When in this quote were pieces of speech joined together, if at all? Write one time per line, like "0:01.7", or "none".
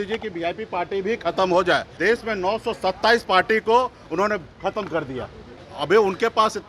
0:02.0
0:05.5